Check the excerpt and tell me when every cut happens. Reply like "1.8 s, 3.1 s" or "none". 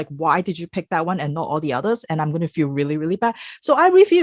none